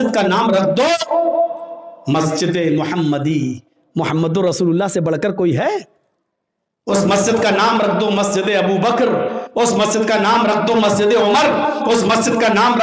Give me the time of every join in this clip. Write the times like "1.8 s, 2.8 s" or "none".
none